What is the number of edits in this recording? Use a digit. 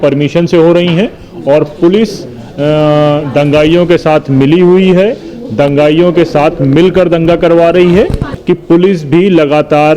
1